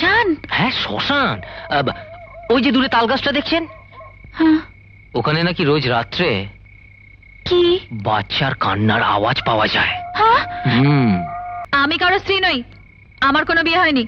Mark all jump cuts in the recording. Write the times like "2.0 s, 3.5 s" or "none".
11.5 s

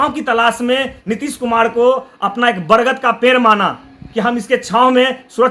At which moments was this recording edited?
none

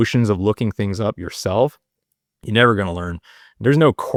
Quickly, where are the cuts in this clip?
none

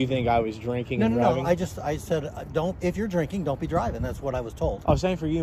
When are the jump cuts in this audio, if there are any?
none

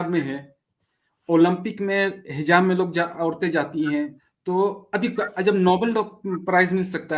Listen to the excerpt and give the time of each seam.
4.2 s

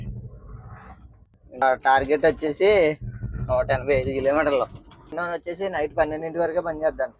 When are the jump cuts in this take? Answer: 5.2 s

